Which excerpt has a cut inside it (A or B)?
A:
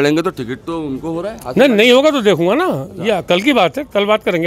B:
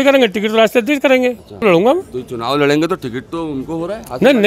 B